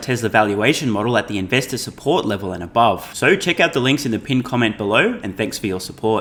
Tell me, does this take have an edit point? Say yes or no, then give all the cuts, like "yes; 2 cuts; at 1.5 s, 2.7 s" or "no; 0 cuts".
no; 0 cuts